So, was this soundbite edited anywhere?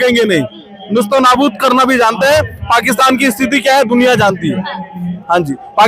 no; 0 cuts

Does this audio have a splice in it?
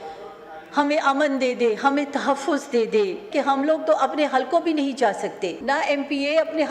yes; 2 cuts; at 3.3 s, 5.6 s

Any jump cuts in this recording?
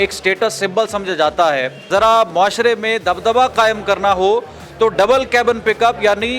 yes; 1 cut; at 1.8 s

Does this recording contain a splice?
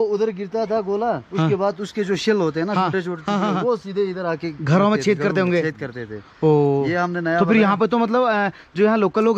no; 0 cuts

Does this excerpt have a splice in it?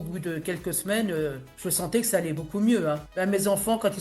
yes; 2 cuts; at 1.5 s, 3.1 s

